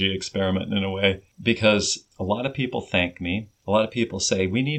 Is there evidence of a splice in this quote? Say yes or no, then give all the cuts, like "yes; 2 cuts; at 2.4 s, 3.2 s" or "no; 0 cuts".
yes; 3 cuts; at 1.3 s, 2.0 s, 3.5 s